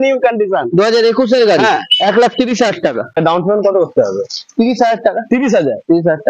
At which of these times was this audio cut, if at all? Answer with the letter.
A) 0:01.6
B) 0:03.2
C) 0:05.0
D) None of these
B